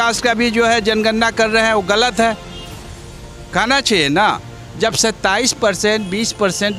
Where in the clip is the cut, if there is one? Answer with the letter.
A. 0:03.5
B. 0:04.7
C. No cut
C